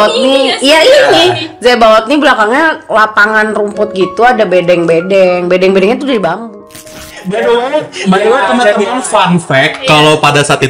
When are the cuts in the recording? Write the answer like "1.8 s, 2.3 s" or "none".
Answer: 6.5 s